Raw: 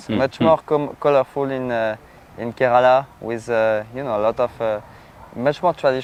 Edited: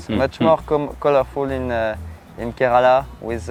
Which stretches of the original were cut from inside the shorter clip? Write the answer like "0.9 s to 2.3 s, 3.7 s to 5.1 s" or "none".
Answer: none